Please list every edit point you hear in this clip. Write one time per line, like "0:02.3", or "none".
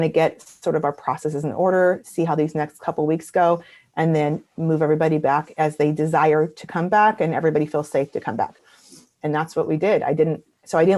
none